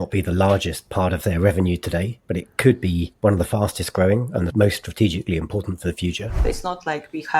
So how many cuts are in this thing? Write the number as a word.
four